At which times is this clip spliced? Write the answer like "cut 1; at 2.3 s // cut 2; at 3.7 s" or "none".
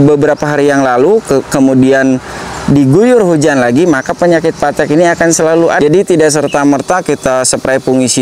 cut 1; at 5.8 s